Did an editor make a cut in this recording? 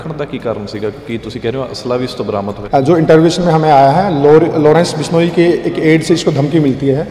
yes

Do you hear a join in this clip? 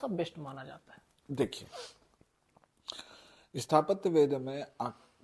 no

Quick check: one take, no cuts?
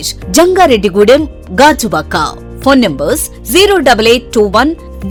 yes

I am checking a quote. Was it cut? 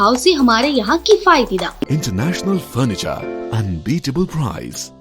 yes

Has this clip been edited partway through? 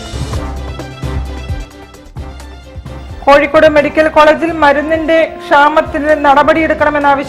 no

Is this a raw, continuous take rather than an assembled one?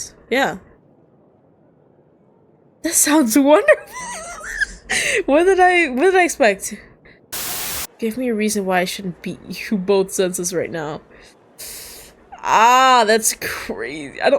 no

